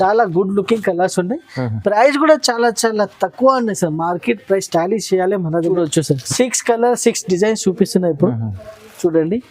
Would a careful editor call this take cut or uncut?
cut